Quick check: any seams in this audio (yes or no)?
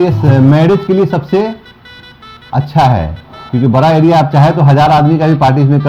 no